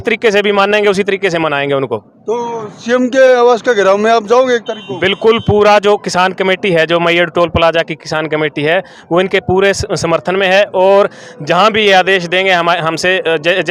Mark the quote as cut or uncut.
uncut